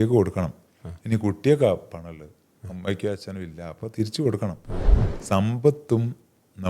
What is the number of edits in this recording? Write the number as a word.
one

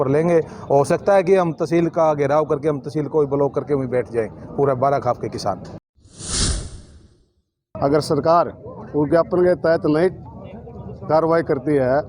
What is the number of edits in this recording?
two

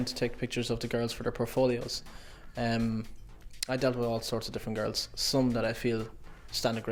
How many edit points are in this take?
zero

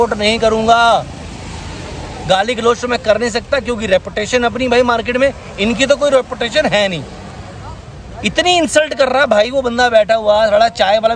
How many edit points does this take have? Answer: zero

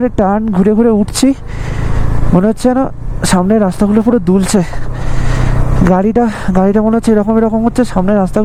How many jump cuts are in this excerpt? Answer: zero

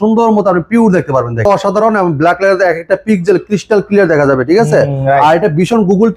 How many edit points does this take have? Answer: one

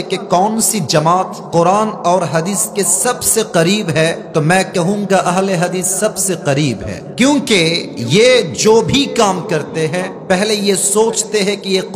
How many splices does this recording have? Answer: five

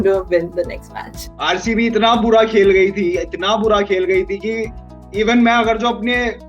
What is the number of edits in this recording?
one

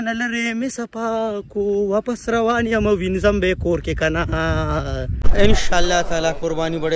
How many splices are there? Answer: one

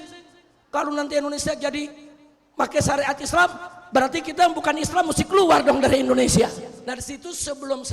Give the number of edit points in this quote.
one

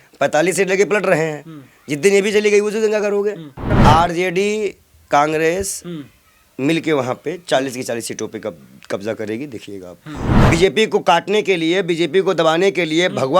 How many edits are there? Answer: two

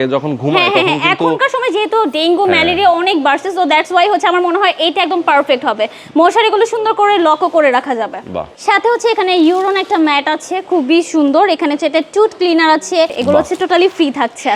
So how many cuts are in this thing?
two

